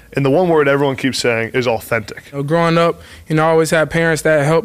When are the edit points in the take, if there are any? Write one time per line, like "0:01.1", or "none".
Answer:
0:02.4